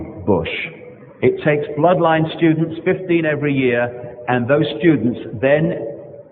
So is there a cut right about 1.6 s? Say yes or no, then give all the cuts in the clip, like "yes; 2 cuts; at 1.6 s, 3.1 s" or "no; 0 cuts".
no; 1 cut; at 3.5 s